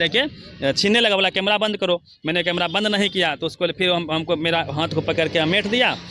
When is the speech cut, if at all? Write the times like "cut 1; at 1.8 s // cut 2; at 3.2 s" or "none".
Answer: none